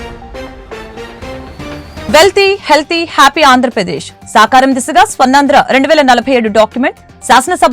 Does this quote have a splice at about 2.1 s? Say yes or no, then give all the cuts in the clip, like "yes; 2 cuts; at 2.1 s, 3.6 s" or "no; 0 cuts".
yes; 1 cut; at 2.1 s